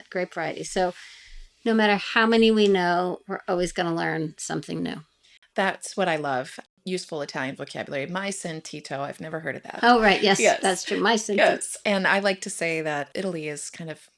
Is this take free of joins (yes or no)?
no